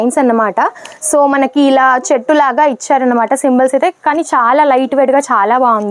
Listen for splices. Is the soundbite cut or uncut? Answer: uncut